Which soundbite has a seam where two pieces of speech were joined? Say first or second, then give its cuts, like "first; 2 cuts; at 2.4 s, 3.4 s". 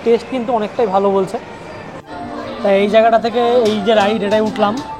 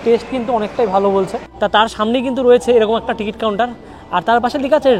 second; 1 cut; at 1.4 s